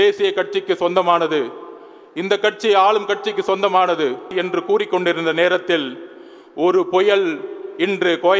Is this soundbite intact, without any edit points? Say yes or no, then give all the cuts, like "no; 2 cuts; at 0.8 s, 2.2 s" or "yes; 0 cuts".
no; 1 cut; at 4.3 s